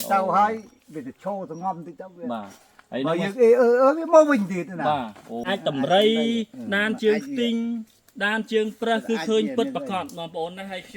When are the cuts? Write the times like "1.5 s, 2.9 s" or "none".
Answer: 5.4 s